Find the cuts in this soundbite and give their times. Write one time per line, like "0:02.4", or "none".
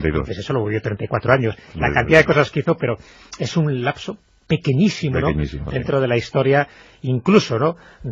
0:01.9